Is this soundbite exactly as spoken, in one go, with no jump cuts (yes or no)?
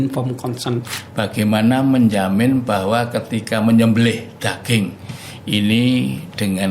no